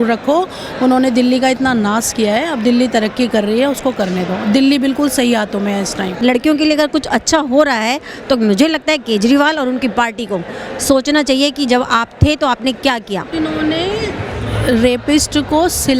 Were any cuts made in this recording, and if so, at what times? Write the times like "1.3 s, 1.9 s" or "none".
6.2 s, 13.3 s